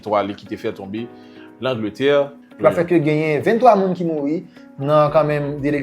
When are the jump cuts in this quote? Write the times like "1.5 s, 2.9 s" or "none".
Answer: 2.4 s

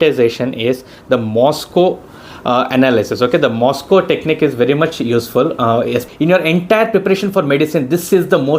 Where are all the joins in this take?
6.1 s

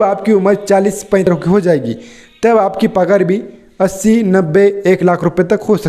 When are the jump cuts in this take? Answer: 1.3 s

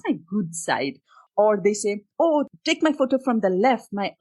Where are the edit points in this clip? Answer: 1.2 s, 2.5 s

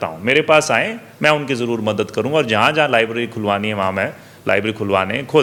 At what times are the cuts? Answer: none

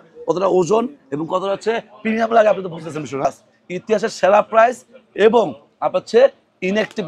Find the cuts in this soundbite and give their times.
3.2 s

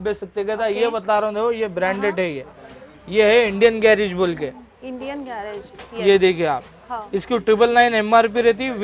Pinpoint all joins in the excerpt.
none

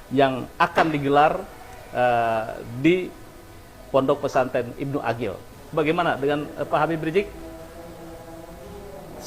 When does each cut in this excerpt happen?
5.5 s

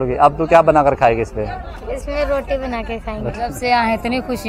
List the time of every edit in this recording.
3.6 s

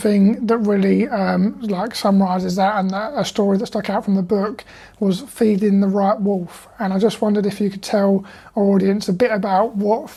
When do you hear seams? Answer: none

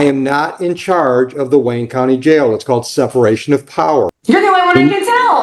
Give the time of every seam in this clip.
4.1 s

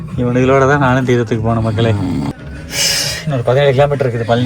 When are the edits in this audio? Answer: 2.3 s

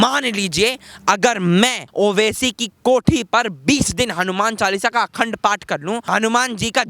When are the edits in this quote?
1.8 s, 6.1 s

